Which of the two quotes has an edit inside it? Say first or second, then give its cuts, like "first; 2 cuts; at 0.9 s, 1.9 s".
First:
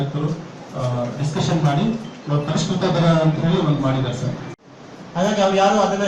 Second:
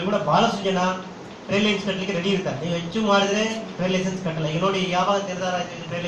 first; 1 cut; at 4.7 s